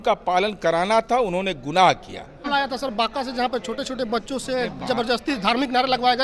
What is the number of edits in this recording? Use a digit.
1